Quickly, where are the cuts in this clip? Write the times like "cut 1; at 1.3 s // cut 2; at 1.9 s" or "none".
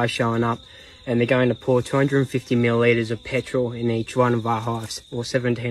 none